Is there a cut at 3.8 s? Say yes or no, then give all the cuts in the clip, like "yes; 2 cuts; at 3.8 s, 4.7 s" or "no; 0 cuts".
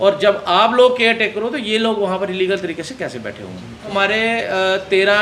yes; 1 cut; at 3.8 s